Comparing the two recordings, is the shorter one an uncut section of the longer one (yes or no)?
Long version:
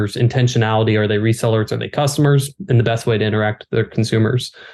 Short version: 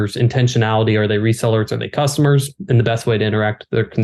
yes